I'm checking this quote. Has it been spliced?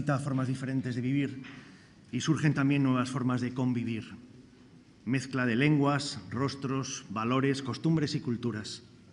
no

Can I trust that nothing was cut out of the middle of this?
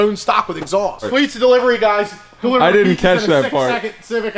no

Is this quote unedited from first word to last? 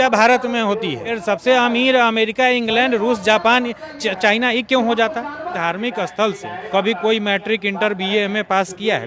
no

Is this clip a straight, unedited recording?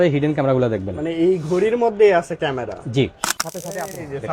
no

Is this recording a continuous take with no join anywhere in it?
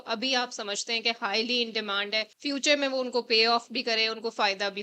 no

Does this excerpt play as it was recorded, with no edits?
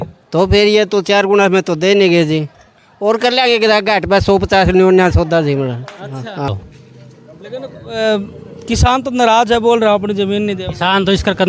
no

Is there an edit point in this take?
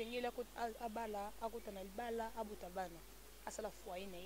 no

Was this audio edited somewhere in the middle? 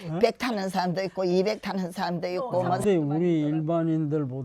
yes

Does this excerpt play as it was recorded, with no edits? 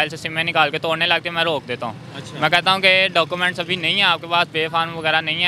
yes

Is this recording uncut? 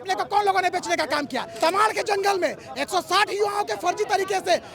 no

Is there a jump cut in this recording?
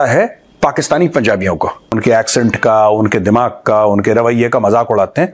yes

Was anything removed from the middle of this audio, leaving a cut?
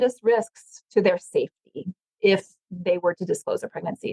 no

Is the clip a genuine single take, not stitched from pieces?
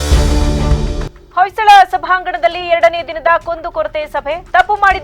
no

